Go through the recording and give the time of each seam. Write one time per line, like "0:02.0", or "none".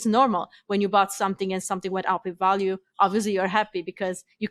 none